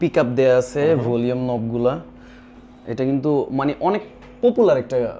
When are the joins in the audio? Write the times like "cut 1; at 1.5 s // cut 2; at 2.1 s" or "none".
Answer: none

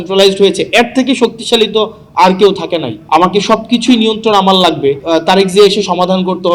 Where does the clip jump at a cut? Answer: cut 1; at 3.0 s // cut 2; at 5.0 s

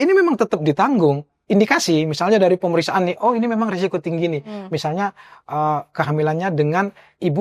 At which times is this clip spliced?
cut 1; at 1.3 s

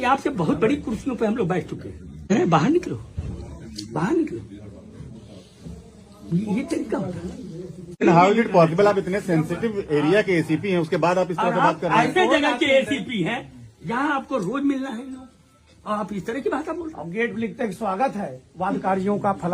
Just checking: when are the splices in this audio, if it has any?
cut 1; at 2.3 s // cut 2; at 8.0 s

